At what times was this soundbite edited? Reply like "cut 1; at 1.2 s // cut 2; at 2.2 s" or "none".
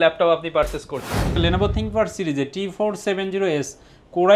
cut 1; at 1.3 s